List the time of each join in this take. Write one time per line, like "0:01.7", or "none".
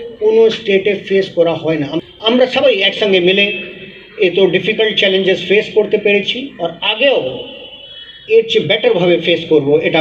0:01.9

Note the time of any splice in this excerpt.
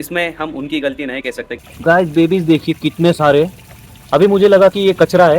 0:01.5

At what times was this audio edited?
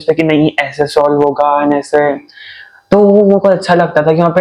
none

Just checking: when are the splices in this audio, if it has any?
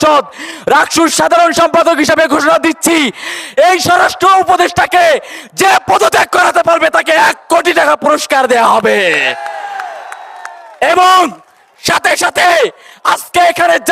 none

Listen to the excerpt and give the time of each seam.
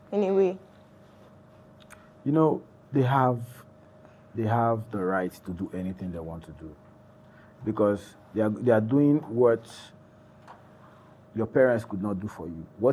none

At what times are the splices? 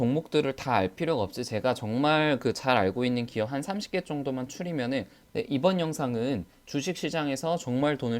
0:05.2

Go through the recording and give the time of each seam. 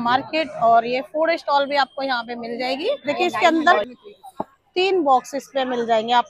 0:03.0

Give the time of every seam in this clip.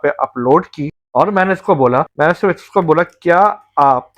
0:02.1

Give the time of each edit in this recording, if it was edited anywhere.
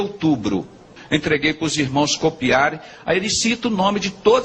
0:01.0

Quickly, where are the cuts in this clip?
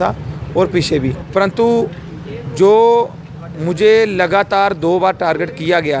0:01.2

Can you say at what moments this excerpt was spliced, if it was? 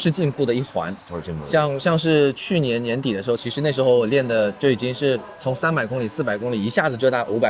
none

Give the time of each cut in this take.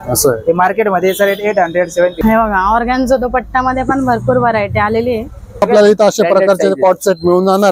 0:02.2
0:05.5

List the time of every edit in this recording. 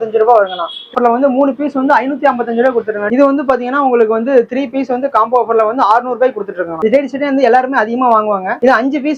0:00.9
0:03.0
0:06.7

